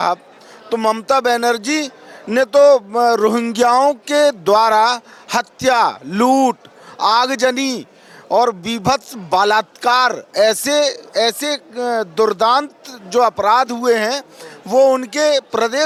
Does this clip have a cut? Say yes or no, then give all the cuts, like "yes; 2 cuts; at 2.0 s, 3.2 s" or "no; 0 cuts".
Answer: no; 0 cuts